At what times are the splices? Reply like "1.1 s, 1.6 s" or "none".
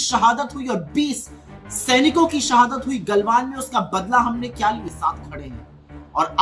4.9 s